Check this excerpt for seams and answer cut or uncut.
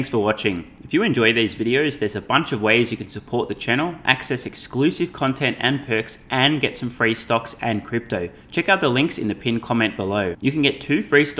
uncut